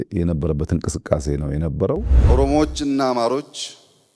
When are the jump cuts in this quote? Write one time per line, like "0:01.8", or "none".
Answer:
0:02.1